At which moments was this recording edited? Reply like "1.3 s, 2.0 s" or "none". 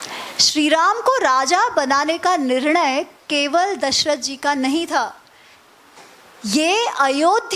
none